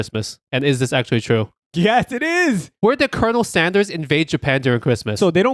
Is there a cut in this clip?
yes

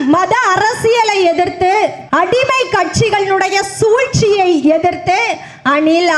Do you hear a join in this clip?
yes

